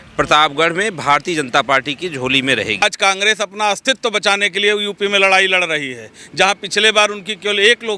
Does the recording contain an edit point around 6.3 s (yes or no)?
no